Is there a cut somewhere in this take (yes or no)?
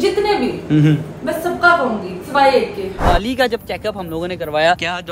yes